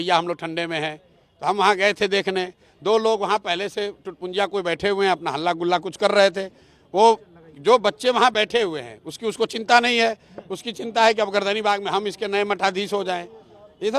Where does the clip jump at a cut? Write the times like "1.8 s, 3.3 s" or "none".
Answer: none